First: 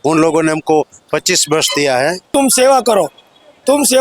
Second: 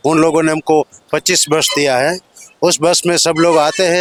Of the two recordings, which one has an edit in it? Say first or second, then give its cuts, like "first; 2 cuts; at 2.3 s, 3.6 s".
first; 1 cut; at 2.3 s